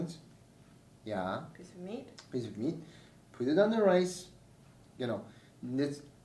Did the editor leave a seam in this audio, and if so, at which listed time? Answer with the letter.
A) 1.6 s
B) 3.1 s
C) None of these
C